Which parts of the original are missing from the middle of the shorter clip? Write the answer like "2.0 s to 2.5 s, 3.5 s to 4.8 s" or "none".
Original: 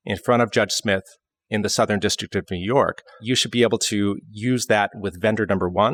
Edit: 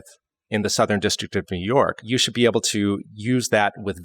3.0 s to 3.2 s